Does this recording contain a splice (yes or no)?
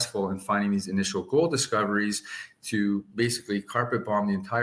no